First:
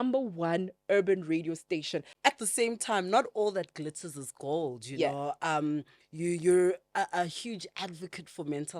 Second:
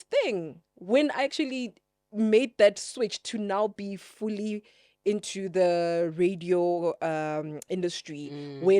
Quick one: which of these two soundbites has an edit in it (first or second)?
first